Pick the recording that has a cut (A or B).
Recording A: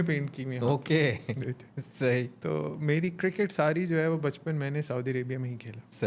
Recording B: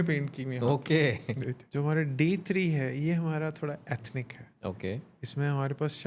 B